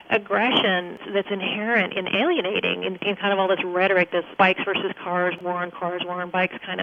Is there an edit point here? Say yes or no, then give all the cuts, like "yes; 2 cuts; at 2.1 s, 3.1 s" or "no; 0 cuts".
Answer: yes; 3 cuts; at 1.0 s, 4.3 s, 5.4 s